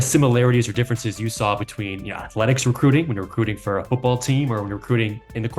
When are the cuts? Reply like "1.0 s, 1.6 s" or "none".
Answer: none